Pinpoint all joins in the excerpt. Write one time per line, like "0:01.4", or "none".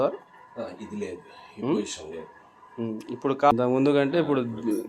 0:03.5